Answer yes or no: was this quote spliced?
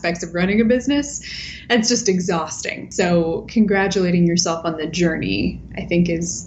yes